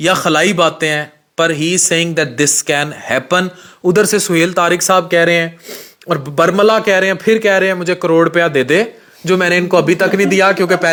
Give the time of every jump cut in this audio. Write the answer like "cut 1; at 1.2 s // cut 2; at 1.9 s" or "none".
none